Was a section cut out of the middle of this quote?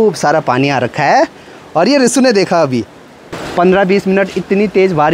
no; 0 cuts

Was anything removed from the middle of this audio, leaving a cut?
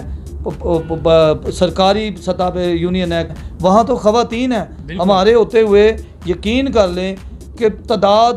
yes; 1 cut; at 3.4 s

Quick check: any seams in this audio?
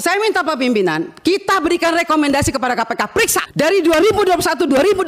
yes; 1 cut; at 3.4 s

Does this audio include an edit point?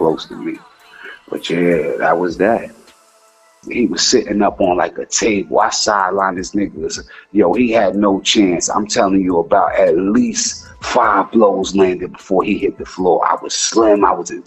yes; 1 cut; at 3.0 s

